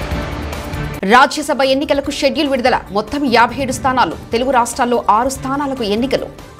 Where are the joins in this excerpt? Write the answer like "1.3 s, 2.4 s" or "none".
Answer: 0.9 s

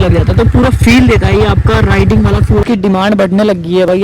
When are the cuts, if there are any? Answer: 2.6 s

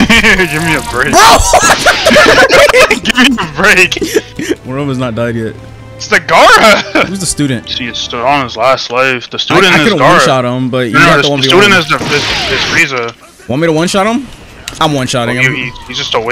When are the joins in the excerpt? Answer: 4.6 s, 7.2 s

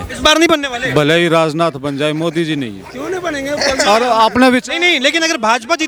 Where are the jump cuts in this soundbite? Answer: none

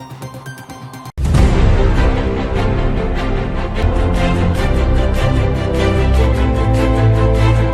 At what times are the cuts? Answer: none

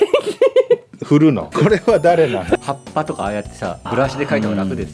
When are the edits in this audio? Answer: 1.5 s, 2.6 s, 3.8 s

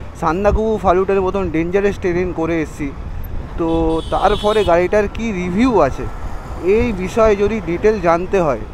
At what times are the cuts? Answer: none

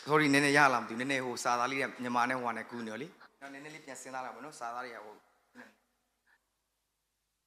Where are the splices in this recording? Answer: 3.2 s

